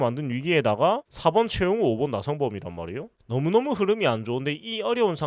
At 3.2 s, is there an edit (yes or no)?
yes